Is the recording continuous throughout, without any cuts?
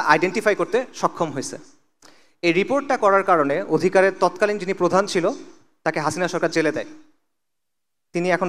yes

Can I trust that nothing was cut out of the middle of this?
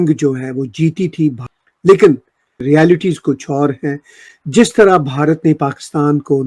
no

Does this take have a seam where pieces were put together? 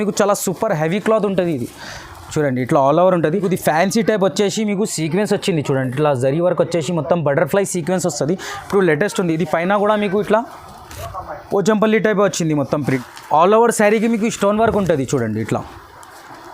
yes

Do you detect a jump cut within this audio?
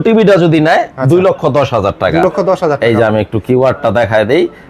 no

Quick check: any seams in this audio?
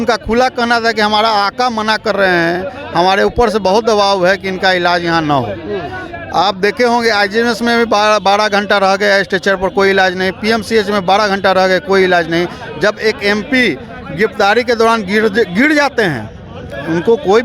no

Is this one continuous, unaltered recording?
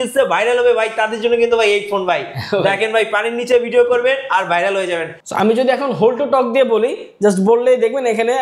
no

